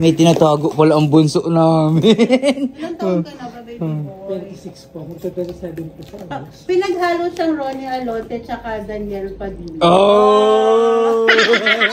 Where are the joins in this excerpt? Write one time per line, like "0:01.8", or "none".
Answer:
none